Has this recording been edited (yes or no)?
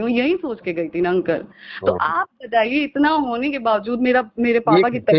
no